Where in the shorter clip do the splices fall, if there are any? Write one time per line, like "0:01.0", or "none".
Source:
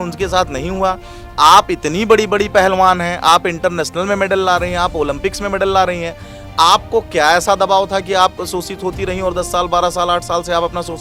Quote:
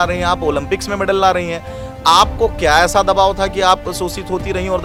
none